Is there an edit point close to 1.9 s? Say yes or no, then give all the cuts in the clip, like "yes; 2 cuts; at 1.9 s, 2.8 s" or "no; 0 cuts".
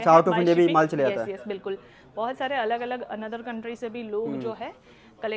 no; 0 cuts